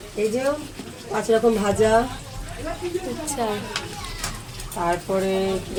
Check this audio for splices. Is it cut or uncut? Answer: uncut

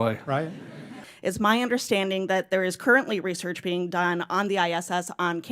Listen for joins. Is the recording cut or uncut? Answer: cut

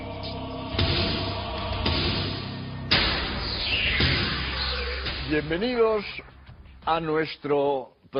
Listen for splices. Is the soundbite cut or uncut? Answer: uncut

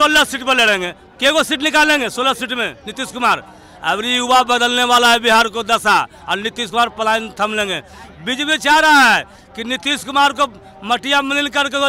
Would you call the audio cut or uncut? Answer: uncut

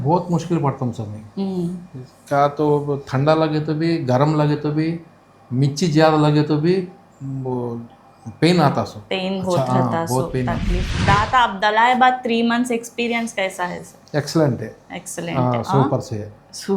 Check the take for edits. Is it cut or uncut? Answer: cut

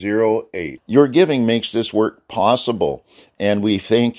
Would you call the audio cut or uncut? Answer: uncut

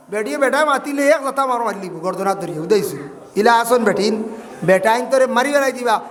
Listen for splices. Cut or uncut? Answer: uncut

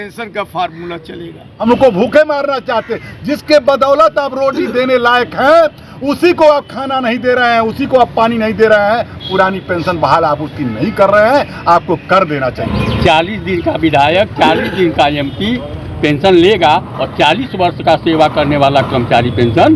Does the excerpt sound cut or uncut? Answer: cut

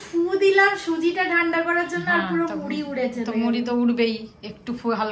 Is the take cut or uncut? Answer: uncut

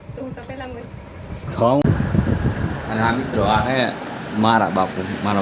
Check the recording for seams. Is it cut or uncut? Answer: cut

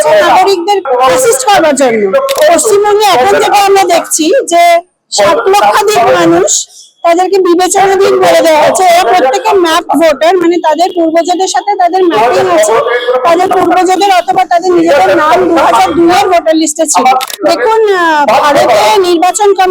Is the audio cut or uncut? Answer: cut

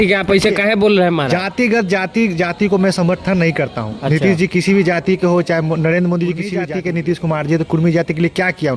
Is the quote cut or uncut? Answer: cut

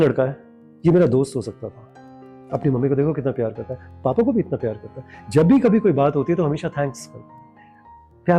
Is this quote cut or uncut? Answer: uncut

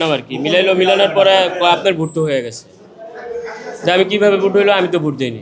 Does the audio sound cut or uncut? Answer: uncut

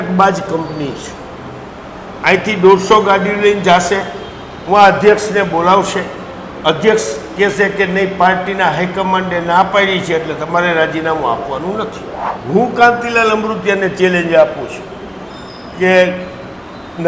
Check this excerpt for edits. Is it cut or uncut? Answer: uncut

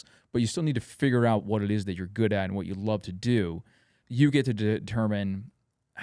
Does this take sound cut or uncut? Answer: cut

